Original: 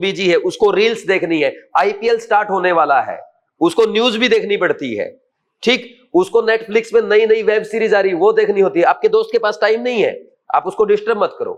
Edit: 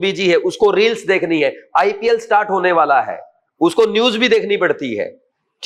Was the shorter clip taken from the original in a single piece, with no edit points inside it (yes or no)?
yes